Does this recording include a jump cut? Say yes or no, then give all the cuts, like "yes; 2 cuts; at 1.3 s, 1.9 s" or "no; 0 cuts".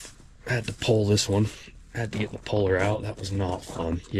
no; 0 cuts